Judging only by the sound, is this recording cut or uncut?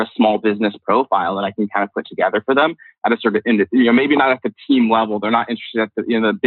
uncut